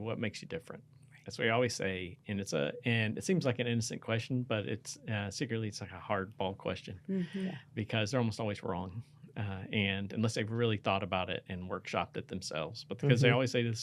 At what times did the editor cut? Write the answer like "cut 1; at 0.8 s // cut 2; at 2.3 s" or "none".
none